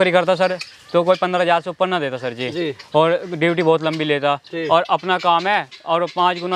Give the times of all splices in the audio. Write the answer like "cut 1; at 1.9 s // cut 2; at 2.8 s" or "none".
none